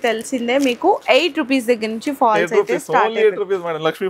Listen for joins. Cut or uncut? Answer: uncut